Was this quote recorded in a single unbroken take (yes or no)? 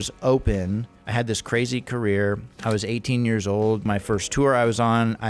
no